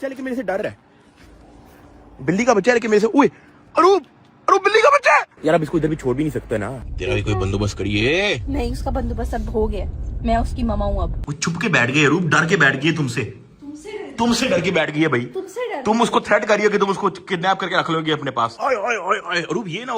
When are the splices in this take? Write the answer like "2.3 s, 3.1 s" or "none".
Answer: 5.3 s, 6.7 s, 11.3 s, 18.5 s